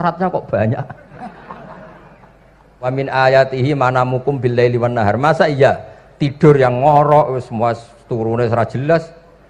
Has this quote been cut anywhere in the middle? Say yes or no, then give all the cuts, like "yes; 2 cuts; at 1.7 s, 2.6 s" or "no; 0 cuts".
yes; 1 cut; at 2.9 s